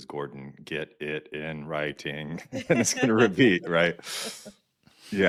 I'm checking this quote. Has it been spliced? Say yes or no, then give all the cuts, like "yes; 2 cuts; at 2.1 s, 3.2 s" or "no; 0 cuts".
no; 0 cuts